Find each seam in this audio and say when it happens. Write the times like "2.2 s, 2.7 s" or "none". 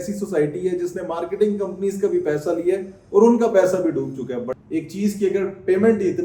4.5 s